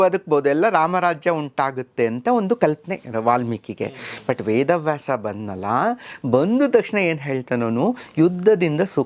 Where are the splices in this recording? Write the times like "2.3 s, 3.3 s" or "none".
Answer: none